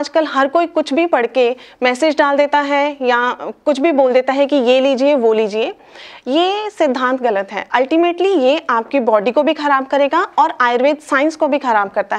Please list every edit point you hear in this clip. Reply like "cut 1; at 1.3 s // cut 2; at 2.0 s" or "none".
none